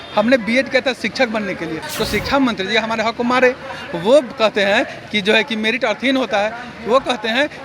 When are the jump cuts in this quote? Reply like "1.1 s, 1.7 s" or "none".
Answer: 1.8 s